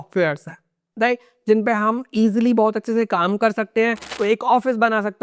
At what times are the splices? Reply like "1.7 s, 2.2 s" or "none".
4.1 s